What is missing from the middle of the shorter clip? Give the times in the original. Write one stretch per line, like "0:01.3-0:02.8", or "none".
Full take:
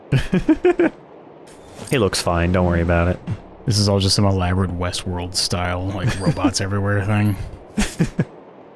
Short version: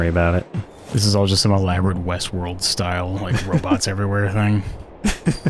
none